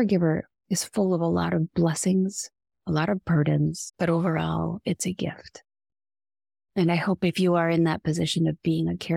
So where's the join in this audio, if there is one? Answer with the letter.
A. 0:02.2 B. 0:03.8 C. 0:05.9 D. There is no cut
B